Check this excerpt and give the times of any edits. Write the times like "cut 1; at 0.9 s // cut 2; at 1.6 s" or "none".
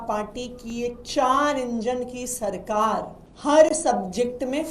cut 1; at 3.2 s